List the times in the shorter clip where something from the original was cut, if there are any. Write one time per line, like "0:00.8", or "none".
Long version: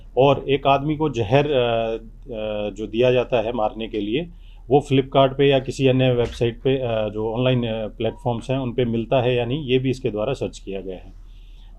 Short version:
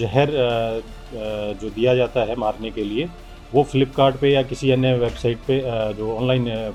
none